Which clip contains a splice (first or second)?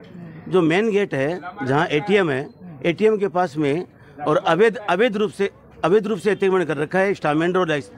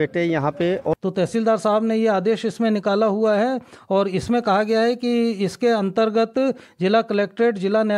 second